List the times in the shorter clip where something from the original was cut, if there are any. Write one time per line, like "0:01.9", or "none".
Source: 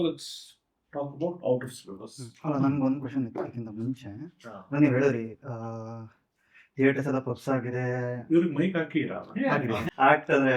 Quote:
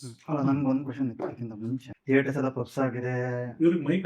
0:01.9